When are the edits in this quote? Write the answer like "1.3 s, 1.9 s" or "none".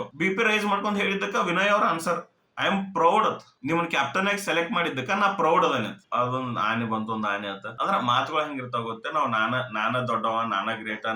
6.0 s, 7.7 s